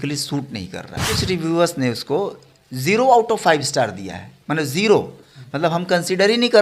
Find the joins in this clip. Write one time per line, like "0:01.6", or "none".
0:01.1

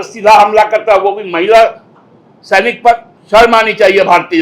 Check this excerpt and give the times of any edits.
0:03.1

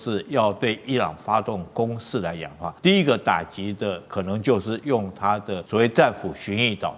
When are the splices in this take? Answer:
0:02.6
0:05.5

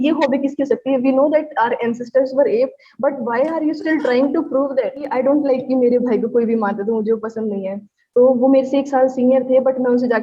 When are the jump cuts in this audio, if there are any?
0:05.0

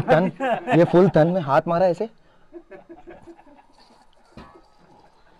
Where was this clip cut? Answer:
none

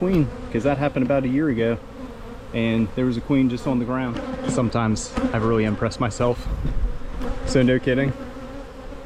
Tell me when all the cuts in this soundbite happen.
0:04.2

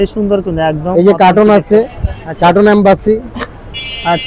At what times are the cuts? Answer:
none

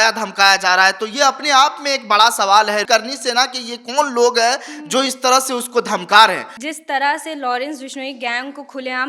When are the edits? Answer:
0:02.8
0:06.5

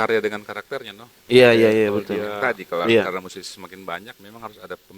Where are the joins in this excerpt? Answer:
0:02.3

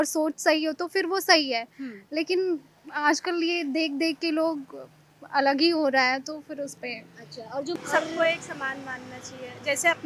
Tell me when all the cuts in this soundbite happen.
0:07.8

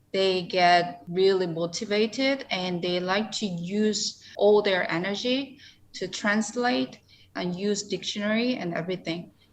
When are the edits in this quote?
0:01.0
0:04.2

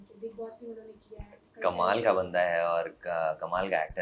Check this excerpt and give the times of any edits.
none

